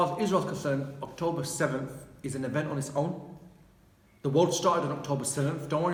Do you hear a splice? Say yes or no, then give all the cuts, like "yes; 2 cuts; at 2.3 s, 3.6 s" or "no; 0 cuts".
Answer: no; 0 cuts